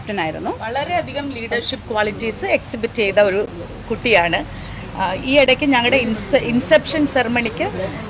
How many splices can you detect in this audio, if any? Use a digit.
0